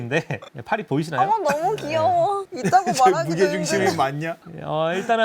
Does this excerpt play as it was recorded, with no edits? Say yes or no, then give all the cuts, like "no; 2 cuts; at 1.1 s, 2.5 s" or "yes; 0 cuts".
yes; 0 cuts